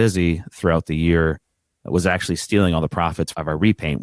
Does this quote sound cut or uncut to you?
uncut